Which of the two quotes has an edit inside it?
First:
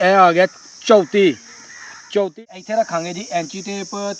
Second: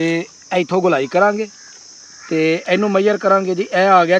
first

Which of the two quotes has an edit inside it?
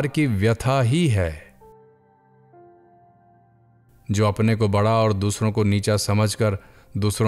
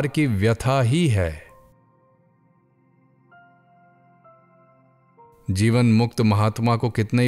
first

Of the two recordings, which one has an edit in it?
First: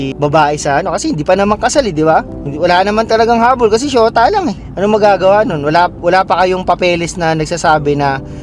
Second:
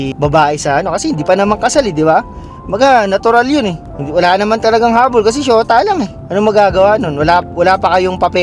first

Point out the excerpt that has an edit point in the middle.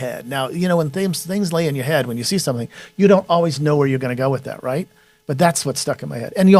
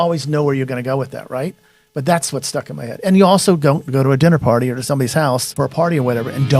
second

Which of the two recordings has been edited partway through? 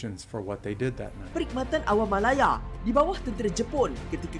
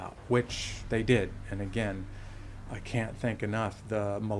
first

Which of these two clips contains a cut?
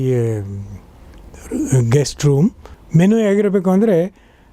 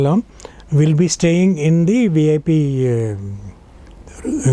first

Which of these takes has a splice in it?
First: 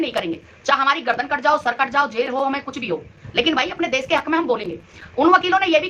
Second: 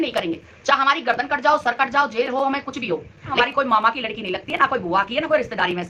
second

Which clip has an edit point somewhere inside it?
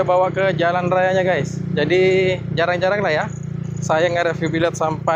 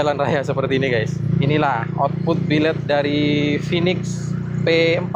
second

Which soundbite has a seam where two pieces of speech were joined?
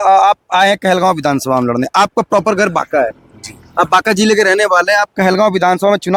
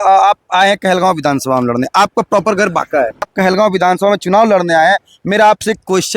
second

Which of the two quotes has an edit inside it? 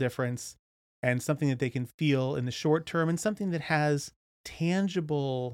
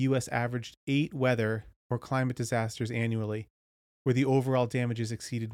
first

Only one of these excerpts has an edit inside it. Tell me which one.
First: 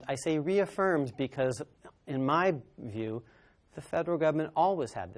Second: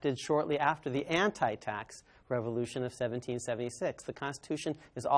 second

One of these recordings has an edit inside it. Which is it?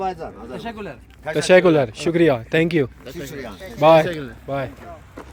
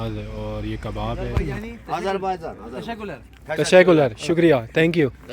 second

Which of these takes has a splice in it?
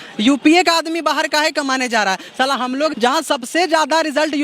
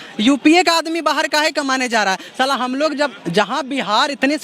first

